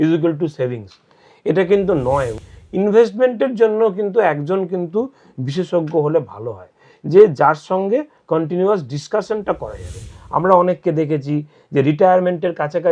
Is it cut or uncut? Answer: cut